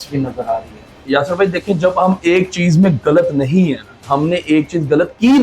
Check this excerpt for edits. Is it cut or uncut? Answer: cut